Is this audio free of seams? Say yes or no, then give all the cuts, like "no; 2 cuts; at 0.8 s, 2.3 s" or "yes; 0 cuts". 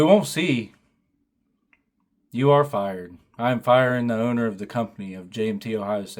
yes; 0 cuts